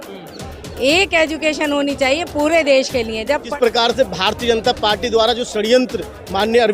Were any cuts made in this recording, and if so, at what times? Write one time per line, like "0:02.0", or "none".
0:03.5

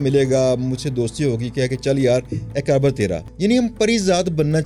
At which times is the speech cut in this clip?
0:03.2

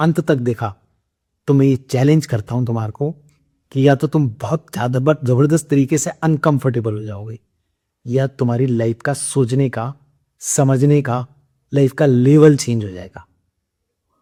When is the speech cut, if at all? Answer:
none

